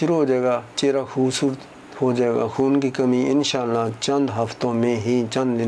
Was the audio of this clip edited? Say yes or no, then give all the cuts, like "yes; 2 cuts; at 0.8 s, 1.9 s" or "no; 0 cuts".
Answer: no; 0 cuts